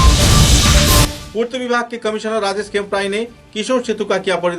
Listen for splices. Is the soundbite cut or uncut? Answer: cut